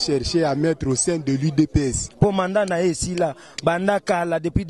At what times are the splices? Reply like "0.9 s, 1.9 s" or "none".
2.1 s